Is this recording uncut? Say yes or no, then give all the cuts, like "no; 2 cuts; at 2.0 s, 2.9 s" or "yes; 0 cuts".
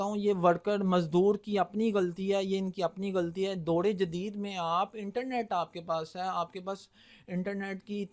yes; 0 cuts